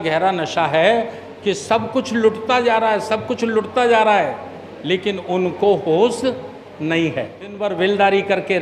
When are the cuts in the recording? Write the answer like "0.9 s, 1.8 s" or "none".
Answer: 7.6 s